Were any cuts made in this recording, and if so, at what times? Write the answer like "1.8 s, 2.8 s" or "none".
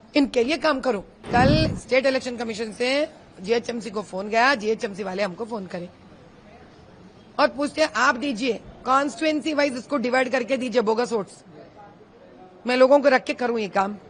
1.1 s